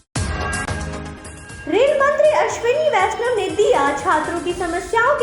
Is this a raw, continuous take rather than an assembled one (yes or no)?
yes